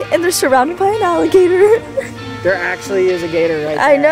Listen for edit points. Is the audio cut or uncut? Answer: uncut